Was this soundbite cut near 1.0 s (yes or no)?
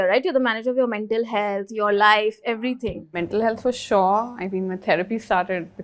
no